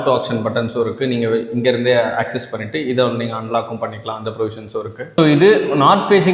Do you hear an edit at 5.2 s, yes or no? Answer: yes